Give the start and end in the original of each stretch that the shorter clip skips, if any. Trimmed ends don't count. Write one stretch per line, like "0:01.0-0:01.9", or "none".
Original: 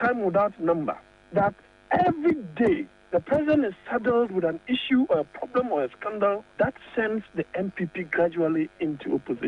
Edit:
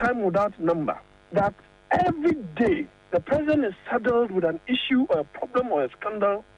none